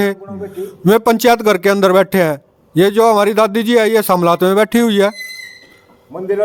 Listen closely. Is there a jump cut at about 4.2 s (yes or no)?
no